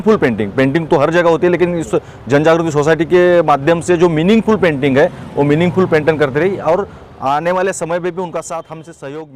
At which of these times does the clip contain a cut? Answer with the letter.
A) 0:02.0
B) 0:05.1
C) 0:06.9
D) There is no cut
D